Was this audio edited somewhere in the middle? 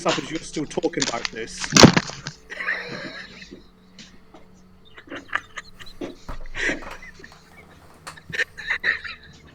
no; 0 cuts

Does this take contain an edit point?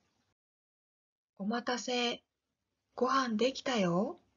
yes; 1 cut; at 3.5 s

